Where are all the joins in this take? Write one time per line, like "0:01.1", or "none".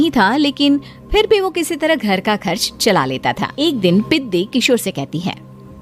0:03.5

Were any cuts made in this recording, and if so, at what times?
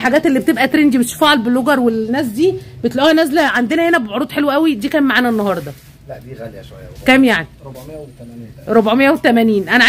none

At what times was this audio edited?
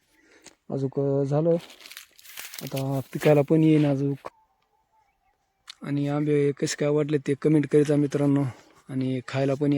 0:04.2

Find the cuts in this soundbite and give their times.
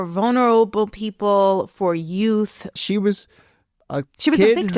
0:02.8

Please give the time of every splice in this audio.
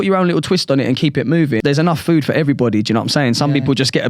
0:01.6

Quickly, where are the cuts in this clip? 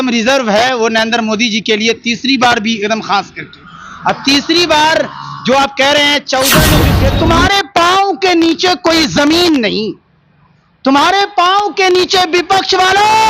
0:06.9

